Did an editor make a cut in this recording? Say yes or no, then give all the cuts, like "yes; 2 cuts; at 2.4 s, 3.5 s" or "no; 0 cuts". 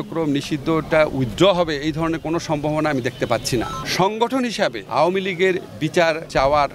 yes; 1 cut; at 3.8 s